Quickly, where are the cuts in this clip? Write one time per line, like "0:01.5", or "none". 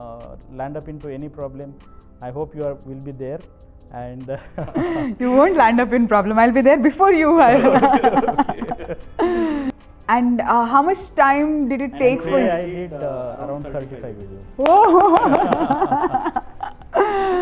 0:09.7